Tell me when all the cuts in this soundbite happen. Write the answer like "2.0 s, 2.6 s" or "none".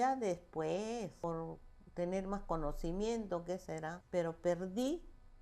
1.2 s, 4.0 s